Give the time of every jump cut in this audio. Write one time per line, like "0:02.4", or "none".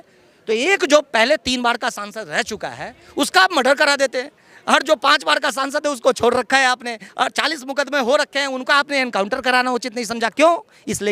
none

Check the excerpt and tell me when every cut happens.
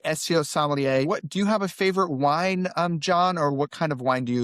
0:01.0

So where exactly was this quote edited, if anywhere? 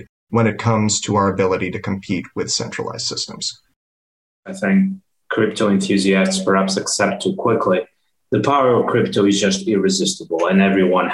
0:04.3

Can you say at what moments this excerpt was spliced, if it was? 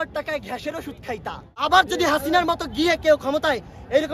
0:01.5

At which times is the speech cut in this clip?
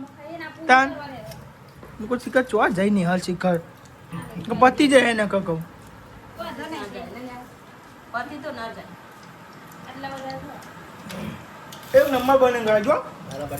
none

